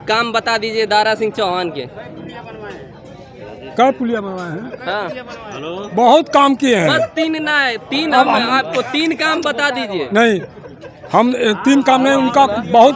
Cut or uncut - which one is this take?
uncut